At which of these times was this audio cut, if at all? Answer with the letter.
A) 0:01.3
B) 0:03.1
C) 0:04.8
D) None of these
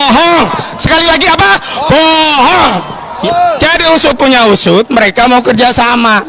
B